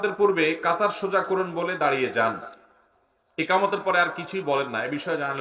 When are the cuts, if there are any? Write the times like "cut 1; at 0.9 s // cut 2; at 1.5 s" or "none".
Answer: none